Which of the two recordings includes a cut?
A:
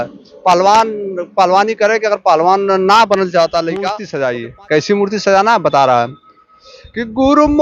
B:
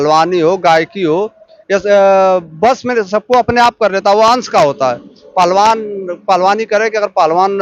A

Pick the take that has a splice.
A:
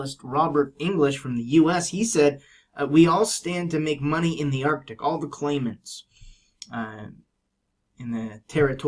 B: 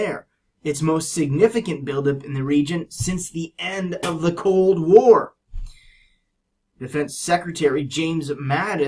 B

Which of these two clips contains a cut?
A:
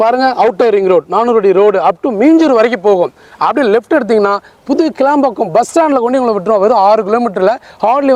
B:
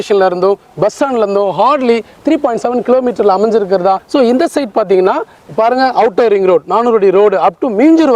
B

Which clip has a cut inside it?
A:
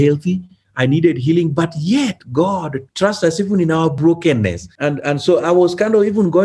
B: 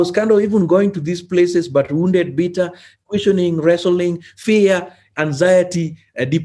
A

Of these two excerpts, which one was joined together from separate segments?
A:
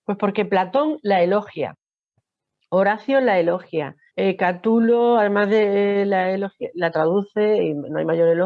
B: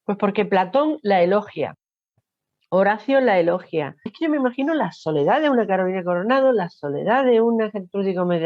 B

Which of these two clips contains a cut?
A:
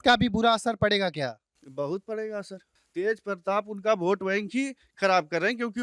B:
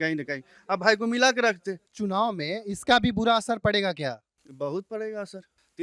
B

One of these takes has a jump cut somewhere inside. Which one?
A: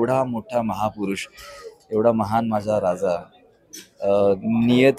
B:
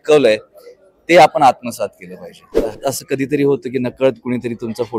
B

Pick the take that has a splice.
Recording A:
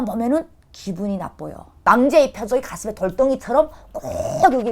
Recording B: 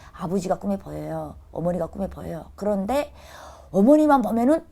A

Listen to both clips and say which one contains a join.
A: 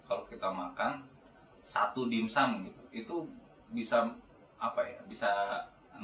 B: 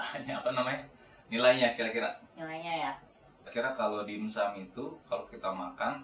B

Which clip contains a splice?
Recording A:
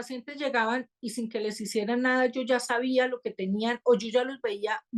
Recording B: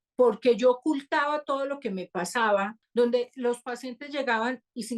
B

